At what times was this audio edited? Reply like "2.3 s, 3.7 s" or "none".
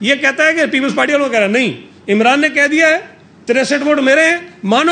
none